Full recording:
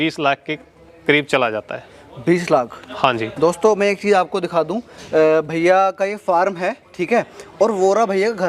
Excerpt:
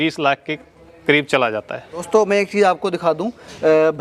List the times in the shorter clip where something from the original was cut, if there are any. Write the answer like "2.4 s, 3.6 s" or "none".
2.1 s